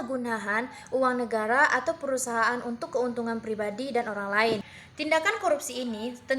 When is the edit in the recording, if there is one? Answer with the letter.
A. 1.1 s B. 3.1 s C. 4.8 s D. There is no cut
C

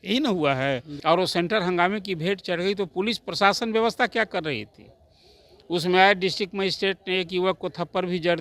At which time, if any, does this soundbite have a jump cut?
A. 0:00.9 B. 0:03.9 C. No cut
A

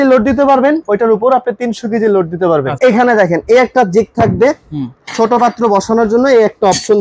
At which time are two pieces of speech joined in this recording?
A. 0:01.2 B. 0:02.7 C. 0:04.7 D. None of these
B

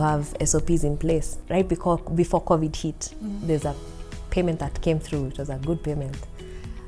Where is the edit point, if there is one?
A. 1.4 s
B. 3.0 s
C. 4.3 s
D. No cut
A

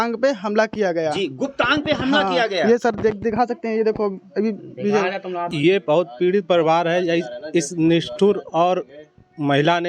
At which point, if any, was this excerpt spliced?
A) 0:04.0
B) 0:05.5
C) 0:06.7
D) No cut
B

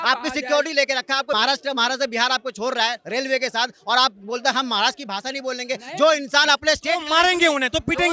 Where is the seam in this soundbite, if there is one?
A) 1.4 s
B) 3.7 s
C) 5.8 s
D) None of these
A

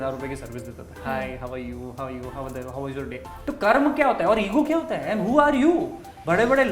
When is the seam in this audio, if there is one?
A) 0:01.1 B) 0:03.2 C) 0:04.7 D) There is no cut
B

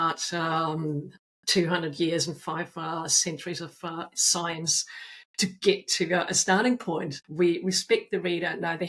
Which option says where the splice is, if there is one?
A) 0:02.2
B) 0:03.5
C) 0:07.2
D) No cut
C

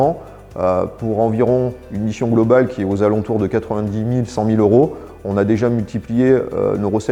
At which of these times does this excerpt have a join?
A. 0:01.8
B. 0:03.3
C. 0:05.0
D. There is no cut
D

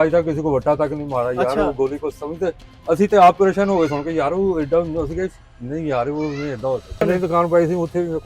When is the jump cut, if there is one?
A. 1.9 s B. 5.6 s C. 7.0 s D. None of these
C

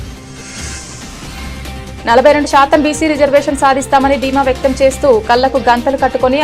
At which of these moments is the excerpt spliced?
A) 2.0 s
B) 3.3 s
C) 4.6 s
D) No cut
A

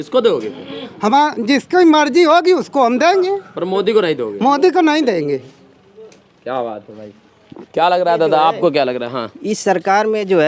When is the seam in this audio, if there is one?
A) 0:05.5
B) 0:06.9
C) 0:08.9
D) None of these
D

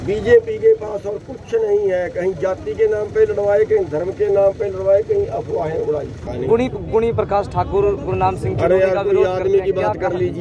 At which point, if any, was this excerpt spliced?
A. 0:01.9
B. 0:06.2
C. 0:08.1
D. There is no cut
B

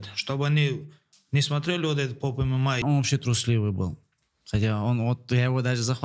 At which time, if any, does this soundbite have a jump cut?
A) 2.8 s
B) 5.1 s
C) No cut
A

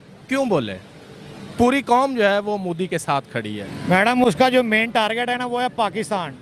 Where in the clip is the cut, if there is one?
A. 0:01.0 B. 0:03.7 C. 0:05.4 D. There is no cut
B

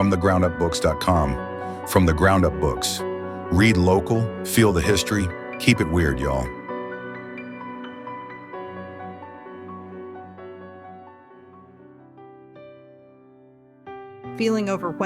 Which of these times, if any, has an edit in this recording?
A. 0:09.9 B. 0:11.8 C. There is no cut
B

